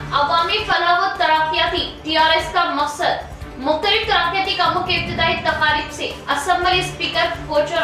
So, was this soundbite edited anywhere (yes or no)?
no